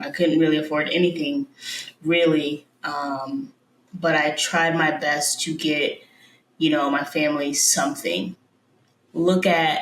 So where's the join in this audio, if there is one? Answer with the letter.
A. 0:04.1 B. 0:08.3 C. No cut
B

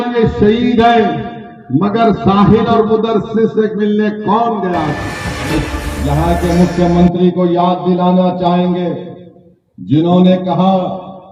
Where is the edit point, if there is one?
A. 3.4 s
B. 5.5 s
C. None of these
B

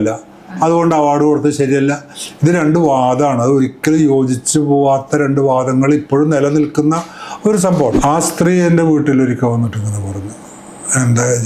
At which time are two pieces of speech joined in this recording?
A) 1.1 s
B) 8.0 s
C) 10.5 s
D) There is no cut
B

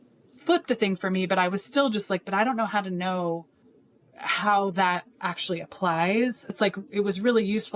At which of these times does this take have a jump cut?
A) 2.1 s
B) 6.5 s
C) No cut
B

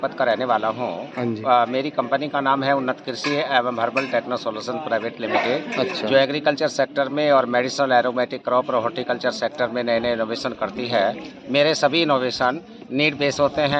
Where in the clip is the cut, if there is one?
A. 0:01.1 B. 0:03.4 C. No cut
C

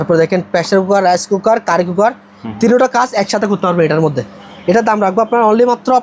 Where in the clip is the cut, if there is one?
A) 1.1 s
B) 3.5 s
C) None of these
C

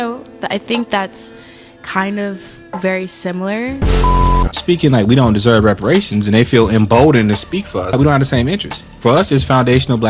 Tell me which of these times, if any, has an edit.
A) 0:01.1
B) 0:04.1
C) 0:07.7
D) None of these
B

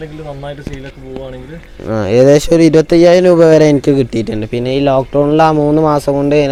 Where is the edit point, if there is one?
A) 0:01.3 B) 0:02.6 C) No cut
C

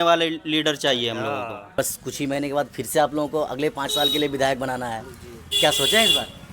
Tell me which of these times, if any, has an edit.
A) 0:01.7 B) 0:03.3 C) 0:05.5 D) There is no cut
A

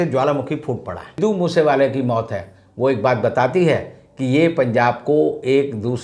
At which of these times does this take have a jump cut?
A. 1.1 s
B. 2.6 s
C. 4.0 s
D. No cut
A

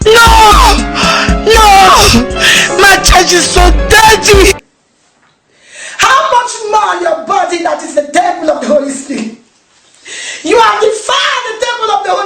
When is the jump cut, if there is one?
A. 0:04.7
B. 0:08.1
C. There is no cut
A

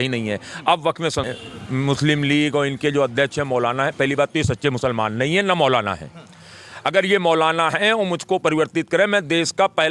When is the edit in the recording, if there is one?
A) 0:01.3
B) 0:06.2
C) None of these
A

